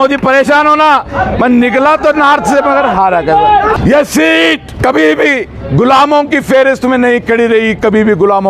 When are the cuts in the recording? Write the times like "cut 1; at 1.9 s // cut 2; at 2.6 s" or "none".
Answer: cut 1; at 3.8 s // cut 2; at 4.7 s